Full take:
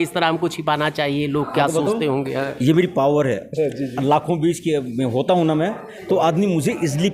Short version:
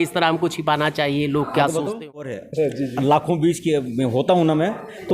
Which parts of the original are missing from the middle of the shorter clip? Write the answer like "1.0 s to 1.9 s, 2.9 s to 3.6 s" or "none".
2.4 s to 3.4 s